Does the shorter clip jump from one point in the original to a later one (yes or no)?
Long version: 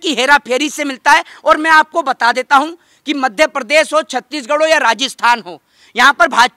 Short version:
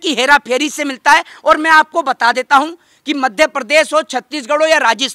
no